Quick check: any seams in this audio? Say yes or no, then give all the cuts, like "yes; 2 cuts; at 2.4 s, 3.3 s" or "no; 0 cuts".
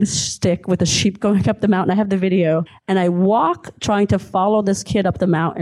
yes; 1 cut; at 2.7 s